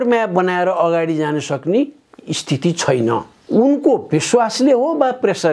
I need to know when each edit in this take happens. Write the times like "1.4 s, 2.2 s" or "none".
3.4 s